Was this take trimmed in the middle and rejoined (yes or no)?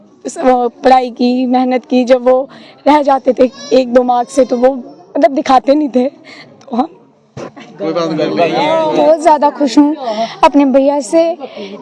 yes